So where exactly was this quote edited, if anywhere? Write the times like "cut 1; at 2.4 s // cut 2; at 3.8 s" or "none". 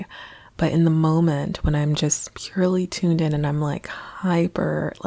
none